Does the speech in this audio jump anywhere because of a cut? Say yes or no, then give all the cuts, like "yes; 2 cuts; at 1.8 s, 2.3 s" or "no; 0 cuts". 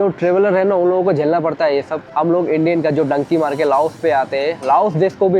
yes; 1 cut; at 2.0 s